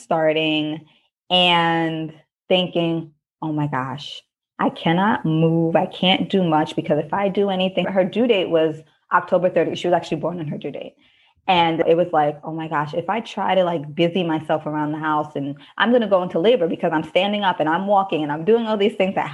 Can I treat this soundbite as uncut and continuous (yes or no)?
no